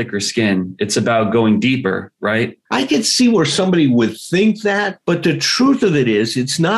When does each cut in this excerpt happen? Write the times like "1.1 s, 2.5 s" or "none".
2.6 s